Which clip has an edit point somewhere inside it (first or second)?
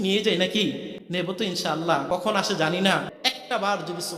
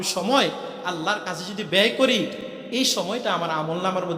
first